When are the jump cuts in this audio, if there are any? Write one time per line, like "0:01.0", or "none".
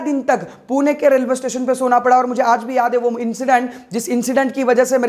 none